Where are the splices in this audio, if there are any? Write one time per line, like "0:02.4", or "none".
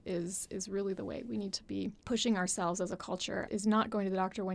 0:02.0
0:03.5